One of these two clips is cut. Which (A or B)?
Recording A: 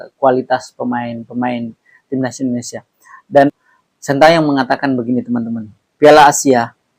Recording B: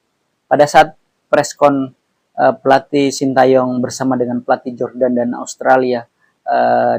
A